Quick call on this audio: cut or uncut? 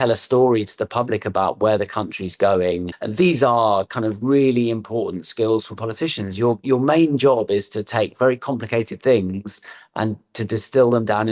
cut